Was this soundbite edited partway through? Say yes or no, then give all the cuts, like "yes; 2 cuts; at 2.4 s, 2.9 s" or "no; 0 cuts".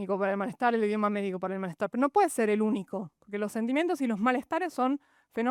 no; 0 cuts